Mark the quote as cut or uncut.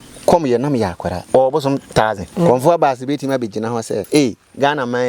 cut